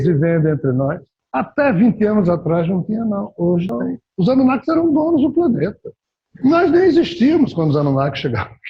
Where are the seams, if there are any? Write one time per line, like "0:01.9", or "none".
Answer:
0:03.8